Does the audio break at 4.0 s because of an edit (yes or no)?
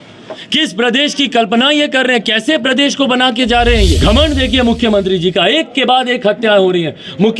yes